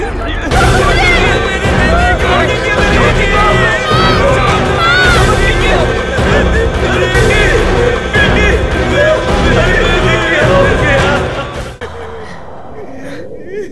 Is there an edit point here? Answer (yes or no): yes